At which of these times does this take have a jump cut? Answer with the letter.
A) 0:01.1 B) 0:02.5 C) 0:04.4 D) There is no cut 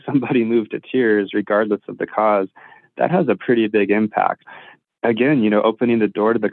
C